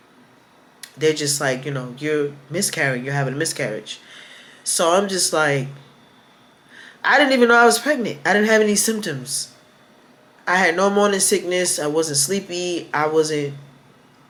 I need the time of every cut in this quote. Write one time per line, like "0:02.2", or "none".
none